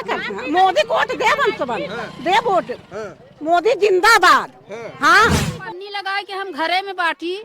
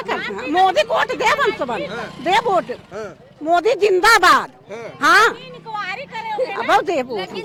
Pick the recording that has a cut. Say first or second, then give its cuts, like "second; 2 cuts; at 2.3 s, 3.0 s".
first; 1 cut; at 5.5 s